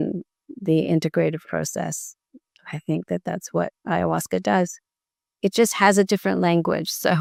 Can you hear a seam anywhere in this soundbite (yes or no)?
no